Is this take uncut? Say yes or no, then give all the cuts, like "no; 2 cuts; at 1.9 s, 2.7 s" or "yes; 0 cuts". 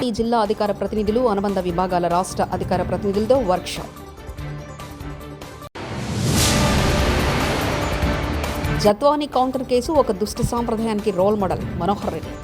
no; 2 cuts; at 5.7 s, 8.6 s